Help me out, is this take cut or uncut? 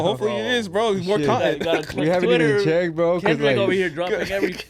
uncut